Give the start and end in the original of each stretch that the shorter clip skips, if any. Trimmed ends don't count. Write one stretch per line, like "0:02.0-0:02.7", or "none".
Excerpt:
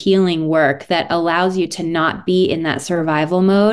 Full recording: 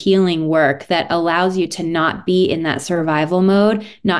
none